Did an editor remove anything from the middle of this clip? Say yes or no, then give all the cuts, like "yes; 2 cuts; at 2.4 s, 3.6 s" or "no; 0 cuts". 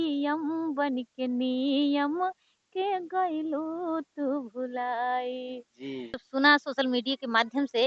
yes; 1 cut; at 6.2 s